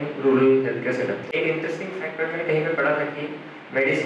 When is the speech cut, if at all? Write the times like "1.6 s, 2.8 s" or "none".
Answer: 1.3 s